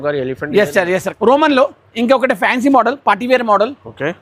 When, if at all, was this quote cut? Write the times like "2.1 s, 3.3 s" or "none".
1.1 s